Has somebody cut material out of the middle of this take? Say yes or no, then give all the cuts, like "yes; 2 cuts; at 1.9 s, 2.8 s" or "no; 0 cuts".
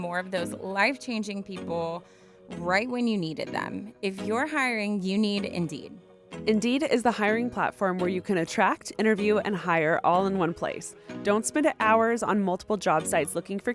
no; 0 cuts